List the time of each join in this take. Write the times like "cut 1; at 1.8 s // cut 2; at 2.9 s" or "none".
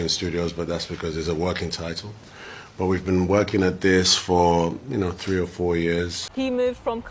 cut 1; at 6.2 s